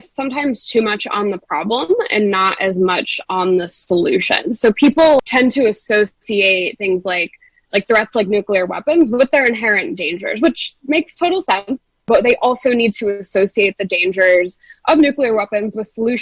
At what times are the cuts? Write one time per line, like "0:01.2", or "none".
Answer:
0:05.2